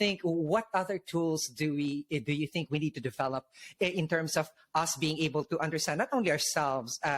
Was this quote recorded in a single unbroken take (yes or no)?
yes